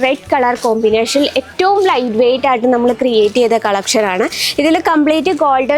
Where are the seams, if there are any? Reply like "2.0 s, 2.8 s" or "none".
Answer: none